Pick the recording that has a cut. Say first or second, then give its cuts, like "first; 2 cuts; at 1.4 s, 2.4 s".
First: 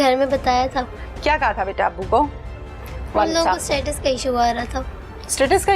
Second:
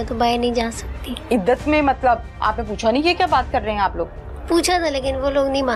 first; 1 cut; at 1.0 s